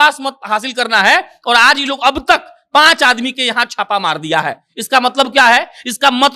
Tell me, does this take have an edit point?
no; 0 cuts

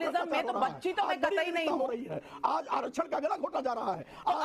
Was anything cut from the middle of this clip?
no; 0 cuts

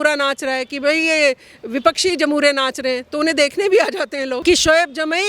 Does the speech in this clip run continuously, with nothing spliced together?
no; 1 cut; at 4.4 s

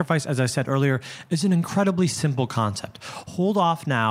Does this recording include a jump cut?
no; 0 cuts

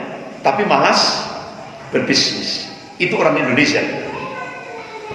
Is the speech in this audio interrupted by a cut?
no; 0 cuts

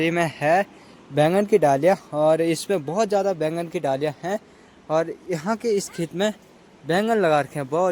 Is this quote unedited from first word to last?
yes; 0 cuts

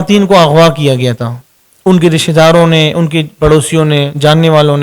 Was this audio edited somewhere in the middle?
no; 0 cuts

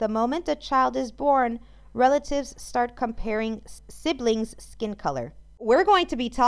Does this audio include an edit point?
yes; 2 cuts; at 3.7 s, 5.6 s

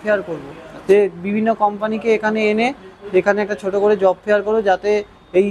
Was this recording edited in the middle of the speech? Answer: no; 0 cuts

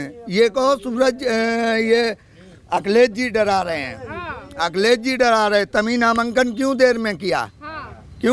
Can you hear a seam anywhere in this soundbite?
no; 0 cuts

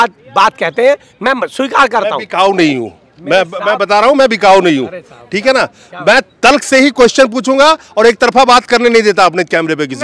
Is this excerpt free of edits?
yes; 0 cuts

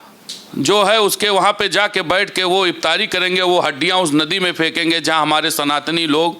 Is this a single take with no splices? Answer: yes; 0 cuts

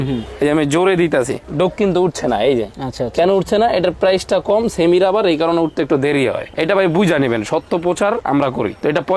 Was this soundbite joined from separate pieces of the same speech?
no; 0 cuts

